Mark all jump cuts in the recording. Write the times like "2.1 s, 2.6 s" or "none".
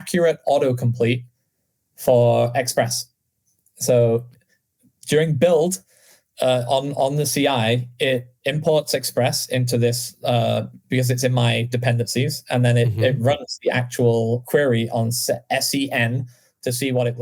14.4 s

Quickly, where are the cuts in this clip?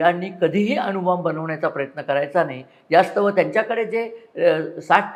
none

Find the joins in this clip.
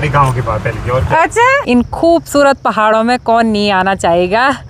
1.6 s

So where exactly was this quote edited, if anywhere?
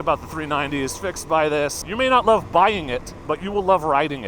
1.8 s, 3.1 s

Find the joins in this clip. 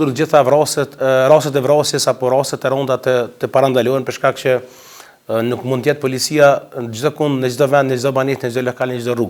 none

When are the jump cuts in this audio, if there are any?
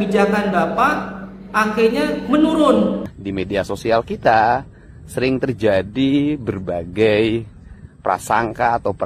3.1 s

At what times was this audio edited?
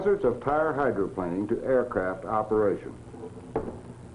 2.6 s

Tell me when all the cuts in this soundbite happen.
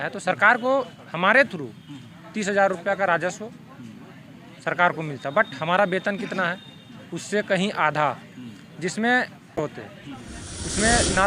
9.6 s

